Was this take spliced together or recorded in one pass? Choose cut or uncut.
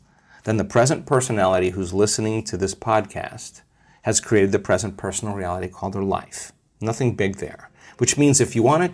uncut